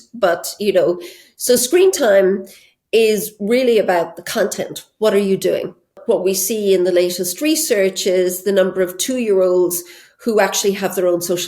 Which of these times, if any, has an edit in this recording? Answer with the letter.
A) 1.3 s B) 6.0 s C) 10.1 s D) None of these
B